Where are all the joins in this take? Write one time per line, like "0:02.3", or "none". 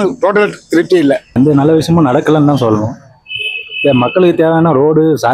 0:01.3